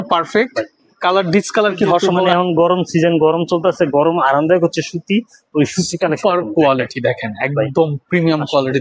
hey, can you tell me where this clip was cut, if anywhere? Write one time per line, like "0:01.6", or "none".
0:02.1